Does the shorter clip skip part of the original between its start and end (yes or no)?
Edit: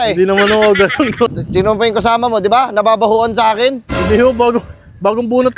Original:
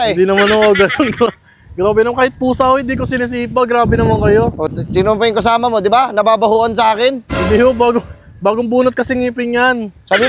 yes